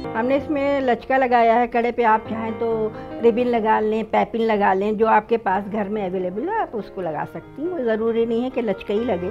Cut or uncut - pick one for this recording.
uncut